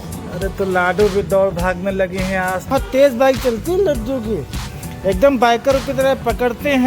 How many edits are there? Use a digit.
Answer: 1